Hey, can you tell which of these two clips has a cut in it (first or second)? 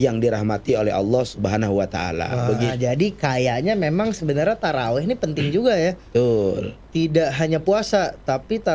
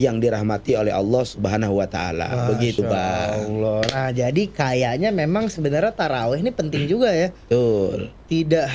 first